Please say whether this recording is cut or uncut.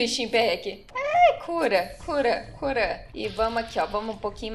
cut